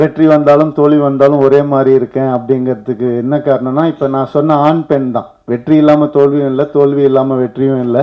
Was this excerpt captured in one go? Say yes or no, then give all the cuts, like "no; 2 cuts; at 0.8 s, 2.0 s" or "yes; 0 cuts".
yes; 0 cuts